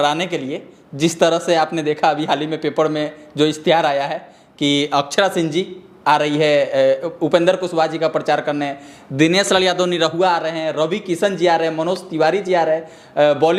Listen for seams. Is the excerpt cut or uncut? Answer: uncut